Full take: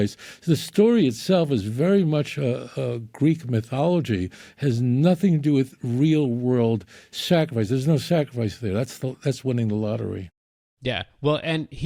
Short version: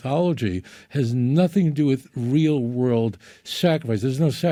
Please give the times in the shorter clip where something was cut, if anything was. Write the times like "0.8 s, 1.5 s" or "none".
none